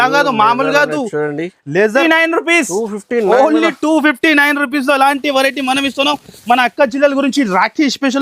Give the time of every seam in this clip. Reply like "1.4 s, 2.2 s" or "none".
2.0 s

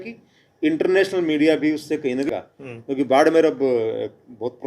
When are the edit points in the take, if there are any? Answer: 2.3 s

